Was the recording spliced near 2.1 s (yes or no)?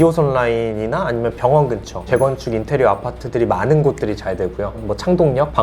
yes